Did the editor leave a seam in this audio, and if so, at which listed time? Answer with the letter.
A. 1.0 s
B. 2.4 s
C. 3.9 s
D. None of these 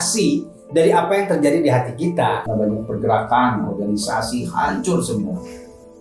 B